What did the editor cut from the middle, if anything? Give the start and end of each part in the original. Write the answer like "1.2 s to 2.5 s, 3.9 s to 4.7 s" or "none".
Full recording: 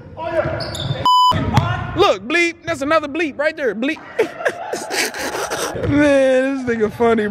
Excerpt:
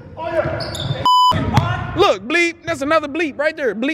none